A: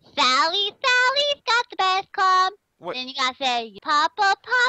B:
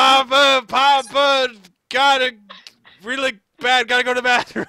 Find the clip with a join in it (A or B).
A